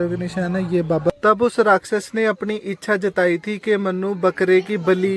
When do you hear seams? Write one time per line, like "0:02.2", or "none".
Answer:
0:01.1